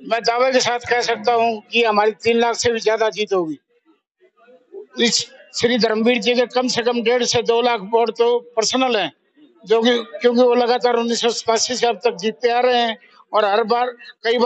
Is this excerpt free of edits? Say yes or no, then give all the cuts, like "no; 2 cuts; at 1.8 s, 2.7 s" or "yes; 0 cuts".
yes; 0 cuts